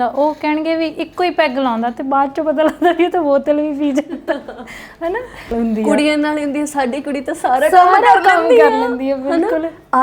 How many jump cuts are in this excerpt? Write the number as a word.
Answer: one